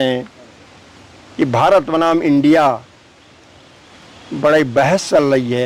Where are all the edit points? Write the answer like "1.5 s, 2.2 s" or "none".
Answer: none